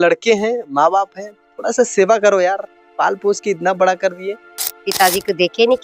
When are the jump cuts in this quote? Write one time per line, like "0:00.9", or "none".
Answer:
0:04.8